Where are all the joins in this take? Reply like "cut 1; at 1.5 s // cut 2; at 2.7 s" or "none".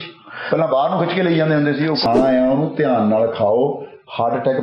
cut 1; at 2.1 s

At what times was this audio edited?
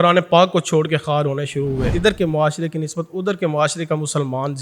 cut 1; at 1.9 s

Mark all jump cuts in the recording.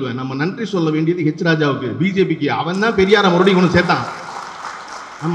none

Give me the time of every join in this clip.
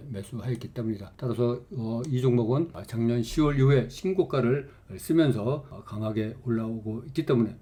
none

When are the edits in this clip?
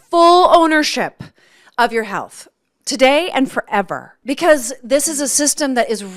cut 1; at 4.1 s

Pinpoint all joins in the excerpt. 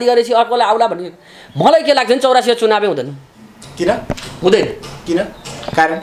none

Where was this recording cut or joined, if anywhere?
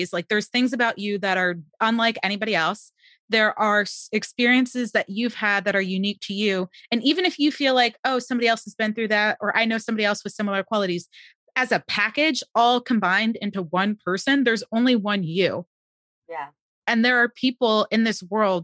none

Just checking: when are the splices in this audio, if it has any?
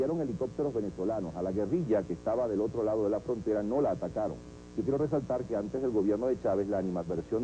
cut 1; at 1.8 s

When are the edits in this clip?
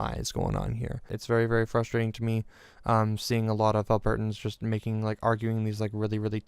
cut 1; at 1.1 s

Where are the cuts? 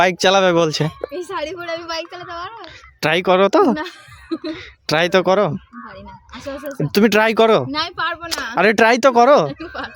none

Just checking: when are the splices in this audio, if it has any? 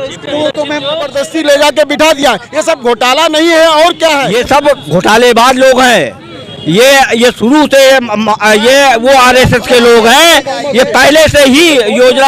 cut 1; at 1.1 s // cut 2; at 4.3 s

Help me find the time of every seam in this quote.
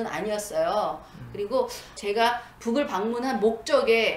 cut 1; at 1.9 s

